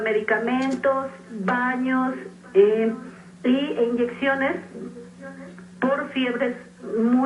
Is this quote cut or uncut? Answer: uncut